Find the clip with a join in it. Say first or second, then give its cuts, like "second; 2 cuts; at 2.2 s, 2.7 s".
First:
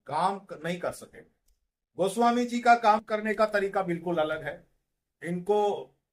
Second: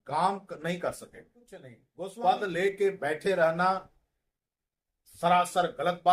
second; 1 cut; at 1.8 s